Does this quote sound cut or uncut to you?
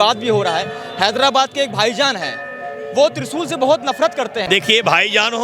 cut